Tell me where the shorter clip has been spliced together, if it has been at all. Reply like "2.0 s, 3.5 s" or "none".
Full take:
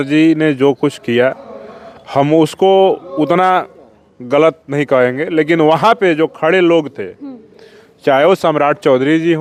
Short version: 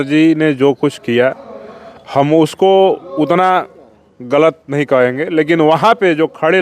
none